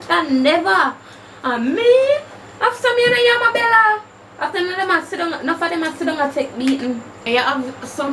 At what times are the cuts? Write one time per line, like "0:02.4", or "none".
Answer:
0:07.1